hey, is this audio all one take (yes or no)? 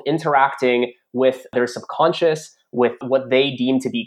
no